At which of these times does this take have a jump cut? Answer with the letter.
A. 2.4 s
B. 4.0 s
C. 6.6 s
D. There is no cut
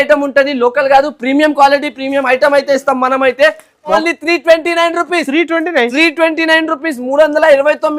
B